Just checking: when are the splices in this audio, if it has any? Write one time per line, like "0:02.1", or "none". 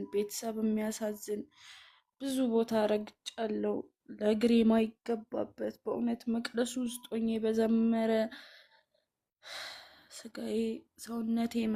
none